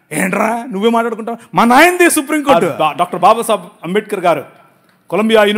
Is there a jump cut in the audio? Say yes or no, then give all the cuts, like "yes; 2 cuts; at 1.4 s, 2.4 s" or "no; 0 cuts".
yes; 1 cut; at 2.7 s